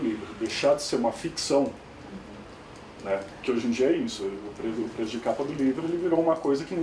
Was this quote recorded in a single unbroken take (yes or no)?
yes